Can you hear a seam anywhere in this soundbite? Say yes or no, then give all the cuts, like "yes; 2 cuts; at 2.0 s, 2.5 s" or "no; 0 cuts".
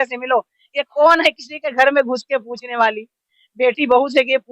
no; 0 cuts